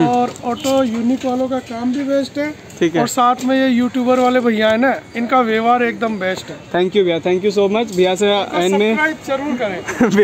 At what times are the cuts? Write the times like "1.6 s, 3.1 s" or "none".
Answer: none